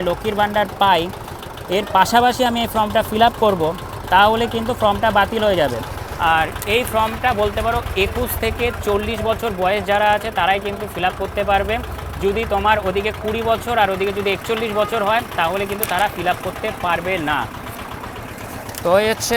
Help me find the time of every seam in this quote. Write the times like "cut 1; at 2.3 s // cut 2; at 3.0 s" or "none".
none